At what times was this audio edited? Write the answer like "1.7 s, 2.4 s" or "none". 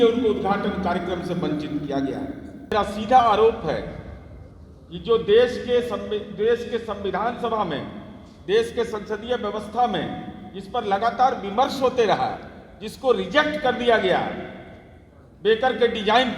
2.7 s